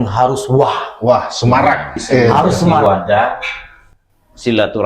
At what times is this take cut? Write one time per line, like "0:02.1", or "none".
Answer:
0:02.8